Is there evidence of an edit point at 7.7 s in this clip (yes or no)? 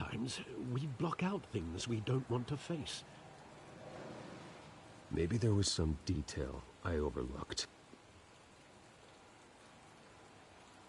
yes